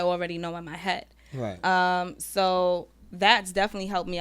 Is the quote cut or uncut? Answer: uncut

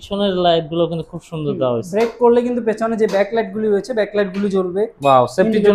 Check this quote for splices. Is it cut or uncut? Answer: uncut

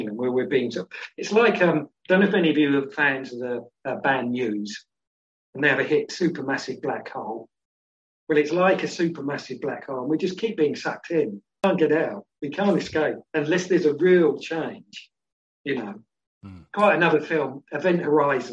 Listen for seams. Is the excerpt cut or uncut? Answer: cut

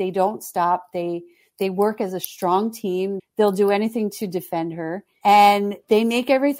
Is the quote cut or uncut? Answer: cut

